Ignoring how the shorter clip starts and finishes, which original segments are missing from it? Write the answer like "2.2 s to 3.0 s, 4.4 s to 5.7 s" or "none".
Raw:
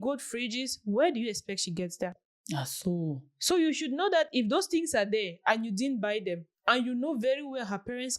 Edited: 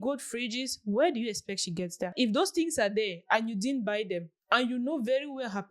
2.1 s to 4.3 s